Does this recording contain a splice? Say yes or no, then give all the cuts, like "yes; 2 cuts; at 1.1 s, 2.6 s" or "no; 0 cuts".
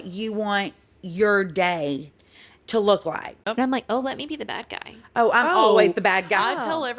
yes; 1 cut; at 3.4 s